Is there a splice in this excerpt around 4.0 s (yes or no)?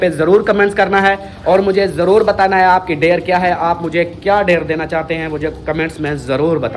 no